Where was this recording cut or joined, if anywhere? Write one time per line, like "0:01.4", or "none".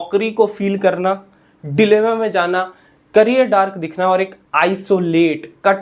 none